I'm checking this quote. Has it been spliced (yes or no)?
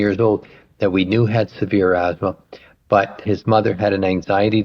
yes